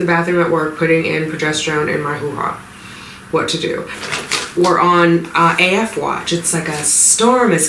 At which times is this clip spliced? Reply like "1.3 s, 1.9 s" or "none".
4.0 s